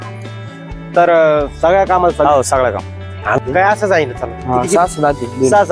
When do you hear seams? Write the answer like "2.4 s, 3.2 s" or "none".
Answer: 3.4 s